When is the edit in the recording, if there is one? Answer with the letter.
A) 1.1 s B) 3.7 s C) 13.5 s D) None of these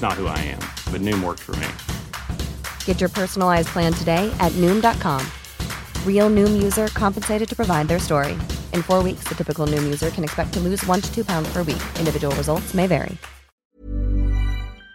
C